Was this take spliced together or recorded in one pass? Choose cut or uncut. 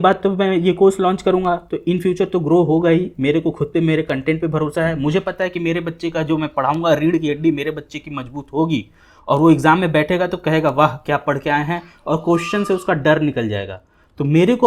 uncut